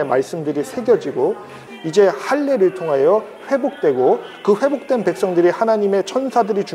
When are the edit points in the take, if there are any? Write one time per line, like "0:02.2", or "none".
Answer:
0:01.6